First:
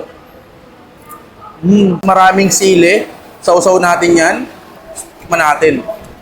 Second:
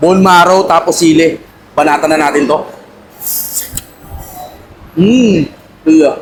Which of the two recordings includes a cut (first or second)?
first